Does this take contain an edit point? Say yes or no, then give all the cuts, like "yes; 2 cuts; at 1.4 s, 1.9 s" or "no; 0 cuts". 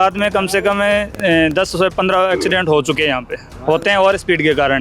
no; 0 cuts